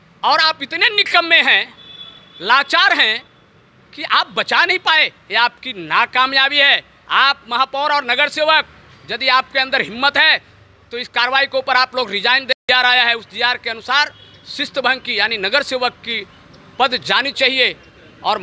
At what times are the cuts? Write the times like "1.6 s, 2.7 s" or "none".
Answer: 12.4 s